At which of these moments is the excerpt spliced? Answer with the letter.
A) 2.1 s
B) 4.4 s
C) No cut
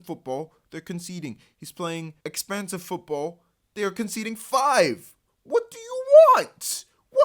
A